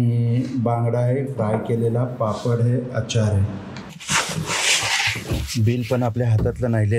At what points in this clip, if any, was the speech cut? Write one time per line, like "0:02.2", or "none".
0:04.0

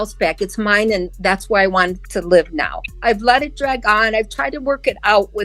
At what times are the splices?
0:02.9

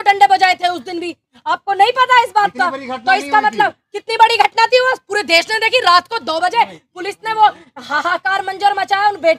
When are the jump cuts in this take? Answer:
none

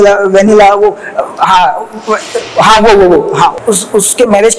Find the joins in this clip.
0:03.6

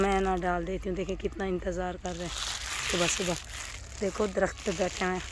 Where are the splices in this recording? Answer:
none

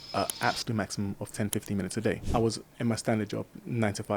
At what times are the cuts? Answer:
0:02.2

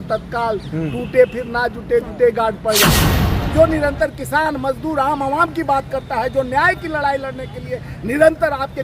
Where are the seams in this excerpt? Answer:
0:03.0

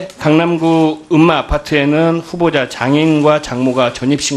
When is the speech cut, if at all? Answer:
0:01.5

